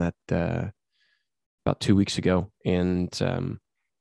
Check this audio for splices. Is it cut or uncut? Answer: uncut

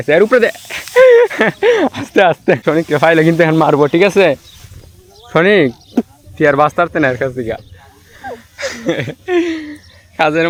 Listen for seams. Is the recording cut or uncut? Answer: uncut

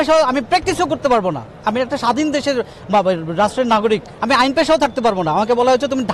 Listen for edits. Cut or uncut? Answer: uncut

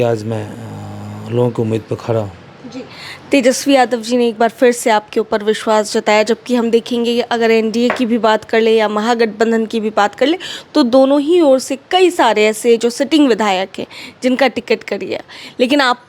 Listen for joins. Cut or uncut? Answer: uncut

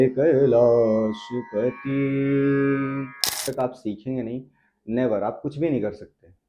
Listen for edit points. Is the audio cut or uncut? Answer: cut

